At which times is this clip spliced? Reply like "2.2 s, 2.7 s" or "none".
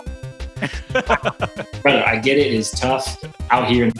1.6 s